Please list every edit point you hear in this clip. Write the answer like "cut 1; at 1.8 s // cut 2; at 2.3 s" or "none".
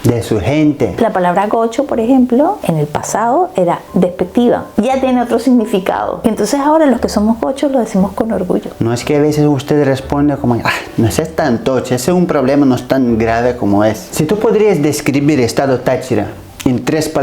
cut 1; at 0.9 s // cut 2; at 4.7 s // cut 3; at 8.8 s // cut 4; at 14.1 s